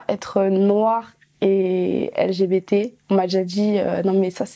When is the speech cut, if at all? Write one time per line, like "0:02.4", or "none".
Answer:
none